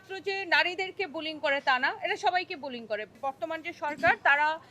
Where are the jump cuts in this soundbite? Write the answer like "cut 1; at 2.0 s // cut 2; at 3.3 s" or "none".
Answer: cut 1; at 3.2 s